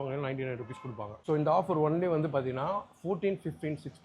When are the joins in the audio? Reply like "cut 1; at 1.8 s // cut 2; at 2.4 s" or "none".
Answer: cut 1; at 1.2 s